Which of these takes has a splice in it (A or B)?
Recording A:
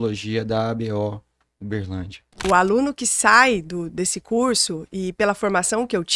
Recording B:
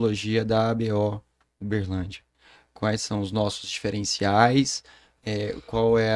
A